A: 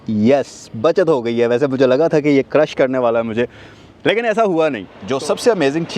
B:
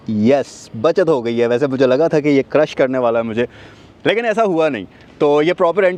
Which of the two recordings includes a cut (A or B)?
A